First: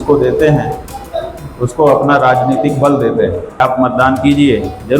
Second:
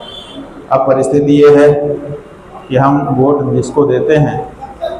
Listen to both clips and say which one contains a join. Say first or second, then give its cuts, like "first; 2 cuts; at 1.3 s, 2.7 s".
first; 1 cut; at 3.6 s